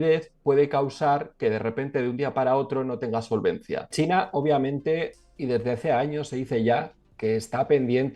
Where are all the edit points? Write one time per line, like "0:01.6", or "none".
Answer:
0:03.9

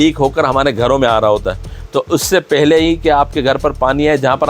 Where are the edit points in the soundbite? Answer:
none

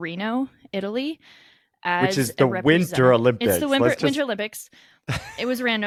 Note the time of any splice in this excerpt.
none

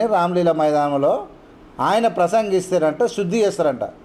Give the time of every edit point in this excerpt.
none

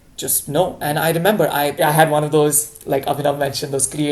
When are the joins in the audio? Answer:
0:01.7

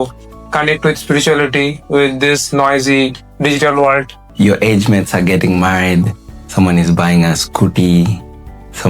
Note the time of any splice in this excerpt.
0:04.2

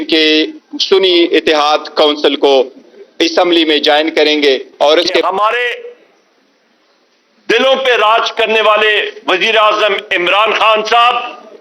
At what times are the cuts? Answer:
0:05.2

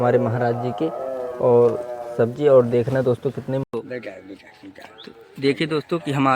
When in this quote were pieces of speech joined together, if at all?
0:03.7

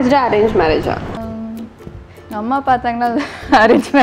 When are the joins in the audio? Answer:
0:01.2

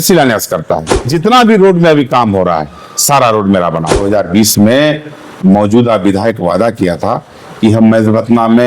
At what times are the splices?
0:01.1
0:04.0

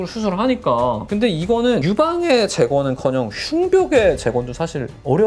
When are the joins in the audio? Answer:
none

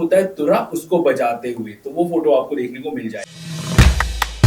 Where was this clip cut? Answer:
0:03.3

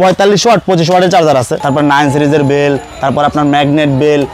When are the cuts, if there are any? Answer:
0:01.6

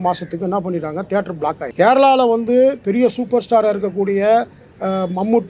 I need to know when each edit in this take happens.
0:01.6

